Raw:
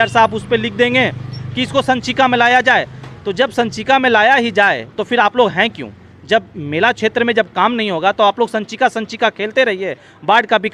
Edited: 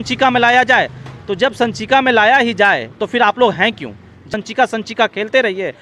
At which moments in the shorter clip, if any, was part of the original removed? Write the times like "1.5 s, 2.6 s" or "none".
4.3 s